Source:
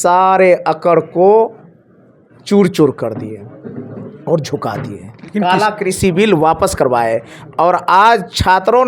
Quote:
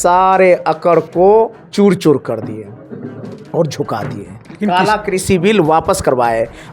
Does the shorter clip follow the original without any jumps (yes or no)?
no